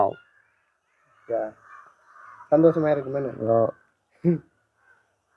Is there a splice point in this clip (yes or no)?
no